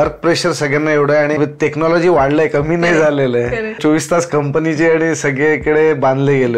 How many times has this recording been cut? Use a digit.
2